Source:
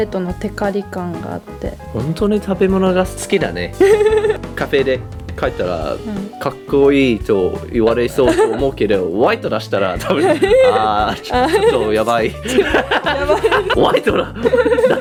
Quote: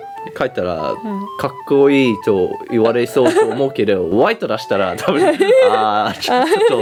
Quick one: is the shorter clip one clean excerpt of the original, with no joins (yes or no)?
yes